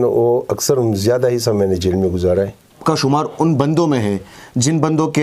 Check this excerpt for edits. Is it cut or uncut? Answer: cut